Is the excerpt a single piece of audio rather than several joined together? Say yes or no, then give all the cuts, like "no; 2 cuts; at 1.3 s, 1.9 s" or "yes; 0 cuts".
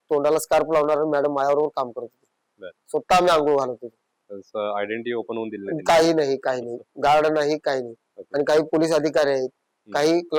yes; 0 cuts